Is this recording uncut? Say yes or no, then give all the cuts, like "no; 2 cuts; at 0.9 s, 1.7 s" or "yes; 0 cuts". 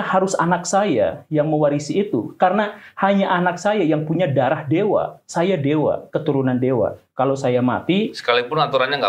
yes; 0 cuts